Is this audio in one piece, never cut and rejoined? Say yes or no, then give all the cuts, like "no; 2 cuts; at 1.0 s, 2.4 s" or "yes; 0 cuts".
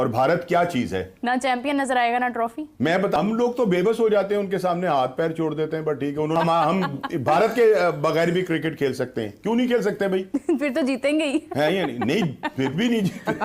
no; 2 cuts; at 3.2 s, 6.4 s